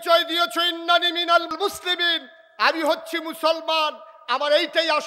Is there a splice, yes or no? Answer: yes